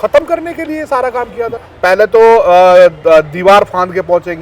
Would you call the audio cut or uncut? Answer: cut